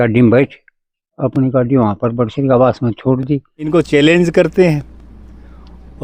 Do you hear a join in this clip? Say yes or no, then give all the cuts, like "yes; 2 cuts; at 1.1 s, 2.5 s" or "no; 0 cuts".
yes; 1 cut; at 3.6 s